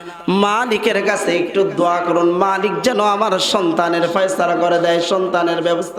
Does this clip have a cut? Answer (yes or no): no